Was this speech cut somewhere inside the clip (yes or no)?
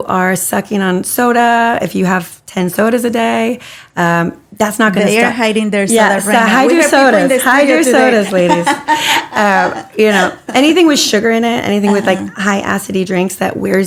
no